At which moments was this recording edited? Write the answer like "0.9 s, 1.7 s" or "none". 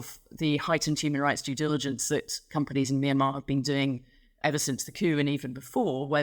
4.4 s